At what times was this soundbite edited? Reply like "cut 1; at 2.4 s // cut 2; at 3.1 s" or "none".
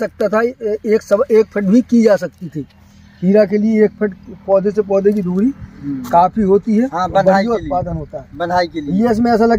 none